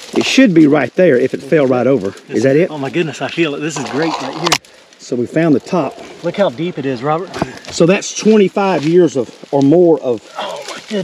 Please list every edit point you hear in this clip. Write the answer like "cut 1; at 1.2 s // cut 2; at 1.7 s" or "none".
cut 1; at 2.7 s